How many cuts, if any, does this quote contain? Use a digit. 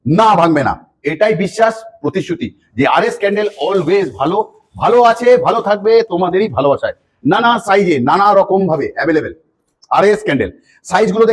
0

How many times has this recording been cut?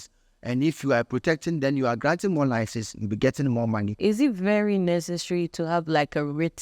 1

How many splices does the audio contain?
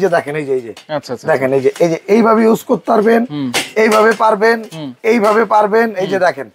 0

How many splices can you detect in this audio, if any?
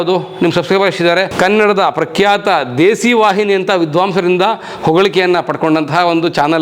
1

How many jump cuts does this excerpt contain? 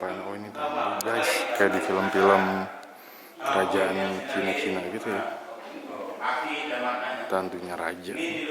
0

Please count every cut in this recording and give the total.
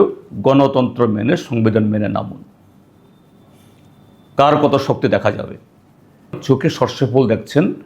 1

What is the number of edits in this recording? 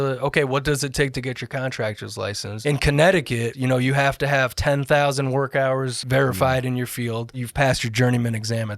4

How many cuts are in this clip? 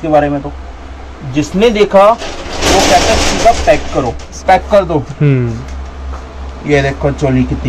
1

